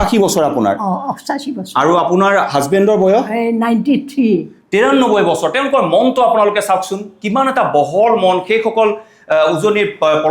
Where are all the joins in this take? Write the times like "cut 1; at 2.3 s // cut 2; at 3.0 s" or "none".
none